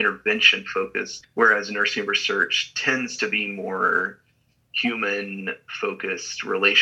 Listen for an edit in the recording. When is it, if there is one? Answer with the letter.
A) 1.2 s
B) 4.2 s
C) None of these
A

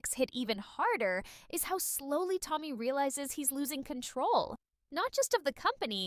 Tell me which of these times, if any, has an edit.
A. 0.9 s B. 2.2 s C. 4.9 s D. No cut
B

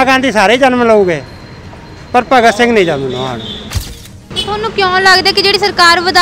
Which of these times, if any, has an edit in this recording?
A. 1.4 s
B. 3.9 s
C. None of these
B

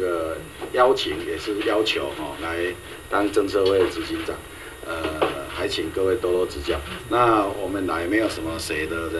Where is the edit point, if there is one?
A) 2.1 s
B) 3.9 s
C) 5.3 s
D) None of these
D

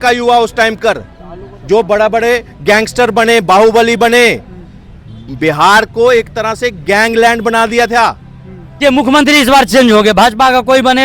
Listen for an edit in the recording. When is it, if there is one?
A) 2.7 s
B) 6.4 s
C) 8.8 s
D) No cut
C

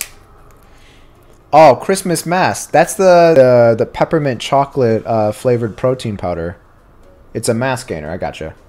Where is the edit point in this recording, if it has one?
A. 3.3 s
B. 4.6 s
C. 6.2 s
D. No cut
A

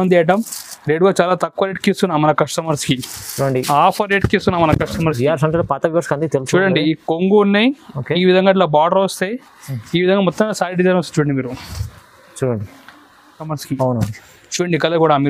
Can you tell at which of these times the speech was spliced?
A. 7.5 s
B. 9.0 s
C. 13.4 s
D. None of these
C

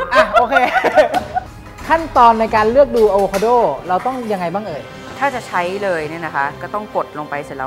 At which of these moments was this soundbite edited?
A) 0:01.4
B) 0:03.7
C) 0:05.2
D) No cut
A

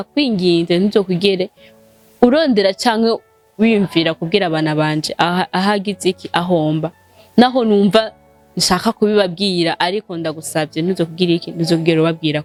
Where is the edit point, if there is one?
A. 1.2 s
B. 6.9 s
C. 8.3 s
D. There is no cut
D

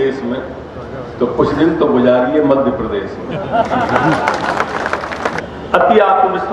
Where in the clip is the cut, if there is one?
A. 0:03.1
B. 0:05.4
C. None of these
B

